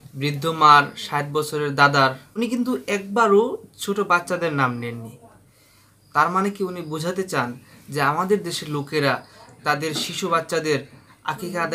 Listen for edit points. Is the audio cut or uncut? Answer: uncut